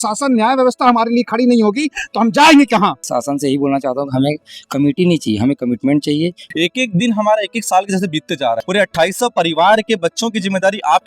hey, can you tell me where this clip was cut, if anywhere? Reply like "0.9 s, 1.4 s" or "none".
3.1 s, 6.4 s, 8.6 s